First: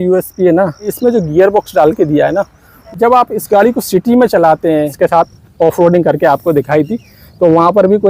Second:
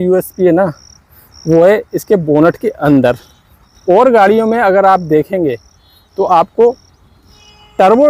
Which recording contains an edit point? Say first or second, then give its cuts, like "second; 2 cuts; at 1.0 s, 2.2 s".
first; 3 cuts; at 0.9 s, 2.8 s, 4.9 s